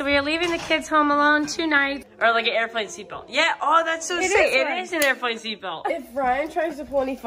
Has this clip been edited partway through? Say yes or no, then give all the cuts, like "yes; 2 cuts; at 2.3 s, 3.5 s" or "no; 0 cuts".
yes; 2 cuts; at 2.1 s, 5.9 s